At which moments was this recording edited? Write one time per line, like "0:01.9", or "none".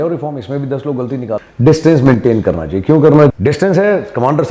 0:01.4
0:03.3